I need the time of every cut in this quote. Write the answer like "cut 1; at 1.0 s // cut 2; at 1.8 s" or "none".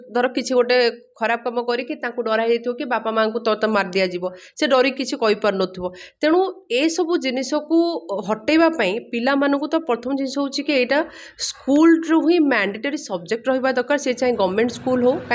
none

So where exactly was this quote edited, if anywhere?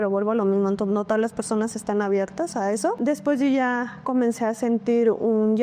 none

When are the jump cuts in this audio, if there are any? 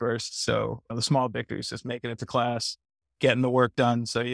none

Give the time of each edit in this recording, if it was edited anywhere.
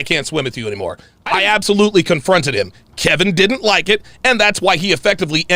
cut 1; at 1.1 s

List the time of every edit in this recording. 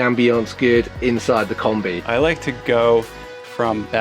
cut 1; at 2.0 s

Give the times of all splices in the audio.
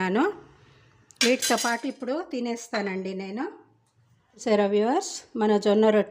cut 1; at 4.4 s

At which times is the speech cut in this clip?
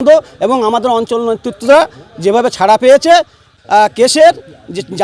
cut 1; at 3.5 s

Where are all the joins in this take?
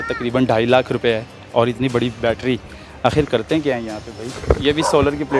cut 1; at 1.3 s // cut 2; at 4.3 s

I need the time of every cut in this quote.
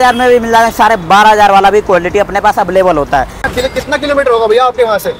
cut 1; at 3.4 s

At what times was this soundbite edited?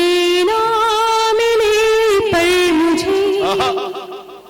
none

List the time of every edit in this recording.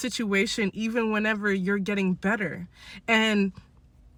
none

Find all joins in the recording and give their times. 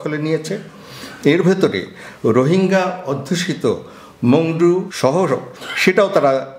cut 1; at 5.4 s

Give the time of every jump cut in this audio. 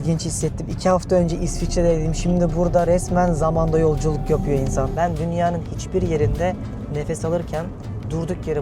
cut 1; at 4.9 s

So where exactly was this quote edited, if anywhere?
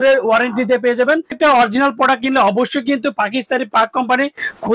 cut 1; at 1.4 s

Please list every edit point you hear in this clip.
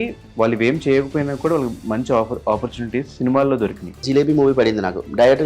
cut 1; at 4.0 s

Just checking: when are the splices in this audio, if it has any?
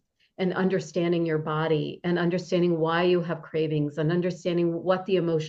none

